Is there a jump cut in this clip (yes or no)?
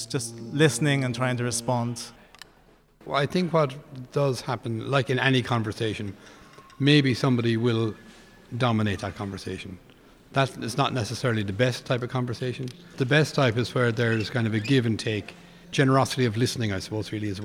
yes